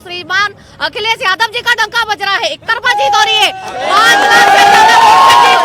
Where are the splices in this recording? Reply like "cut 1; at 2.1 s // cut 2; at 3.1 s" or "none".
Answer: none